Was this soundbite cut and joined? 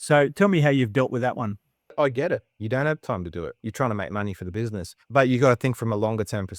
yes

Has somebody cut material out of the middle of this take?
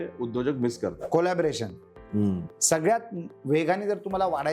yes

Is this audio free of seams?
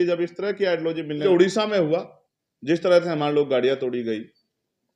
no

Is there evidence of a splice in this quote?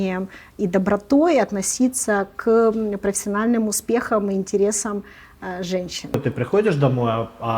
yes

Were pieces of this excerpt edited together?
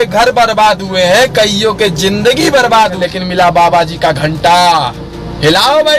yes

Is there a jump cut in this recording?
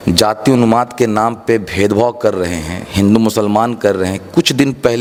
no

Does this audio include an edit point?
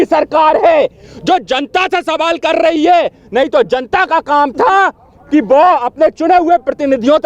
no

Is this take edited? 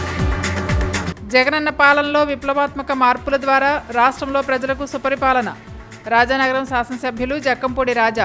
no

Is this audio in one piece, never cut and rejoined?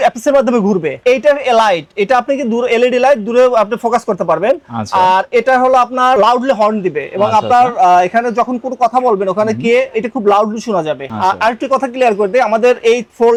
yes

